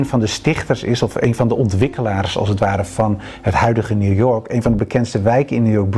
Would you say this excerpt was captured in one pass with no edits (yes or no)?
yes